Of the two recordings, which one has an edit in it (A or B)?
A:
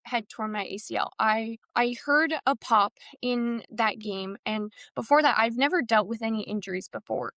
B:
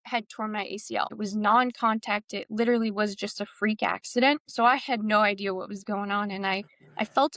B